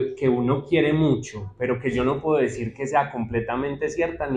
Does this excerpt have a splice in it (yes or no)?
no